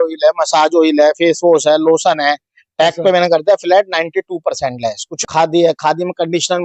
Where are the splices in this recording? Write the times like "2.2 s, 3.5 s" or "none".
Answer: 5.1 s